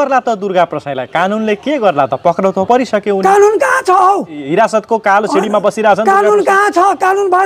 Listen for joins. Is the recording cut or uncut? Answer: uncut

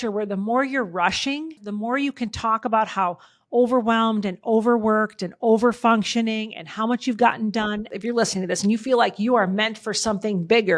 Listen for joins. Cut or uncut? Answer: cut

